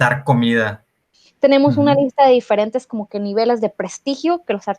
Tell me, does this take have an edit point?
yes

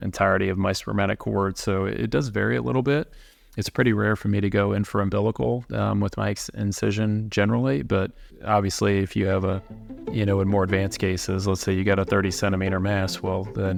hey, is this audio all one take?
yes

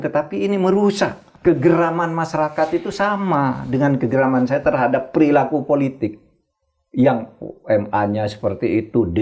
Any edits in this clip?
yes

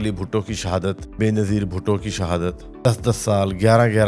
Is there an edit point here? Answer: yes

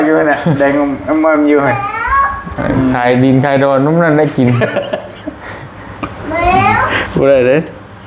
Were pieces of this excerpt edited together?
no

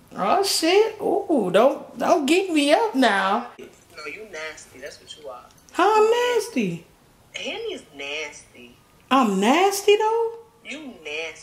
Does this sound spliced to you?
yes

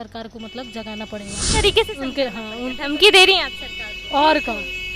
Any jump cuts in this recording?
yes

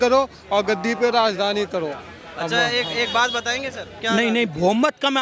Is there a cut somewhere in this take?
yes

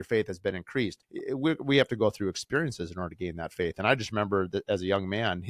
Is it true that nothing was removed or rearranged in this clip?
no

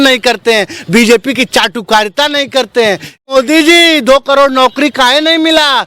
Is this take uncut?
no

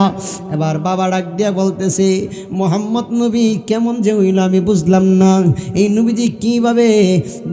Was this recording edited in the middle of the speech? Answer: no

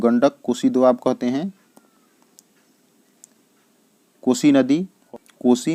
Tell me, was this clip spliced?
no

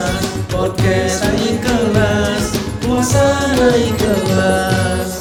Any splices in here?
no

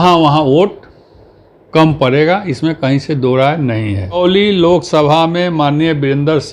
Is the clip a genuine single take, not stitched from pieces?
no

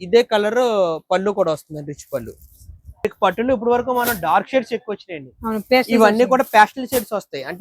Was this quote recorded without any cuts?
no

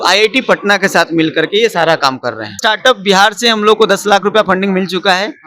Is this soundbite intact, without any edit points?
no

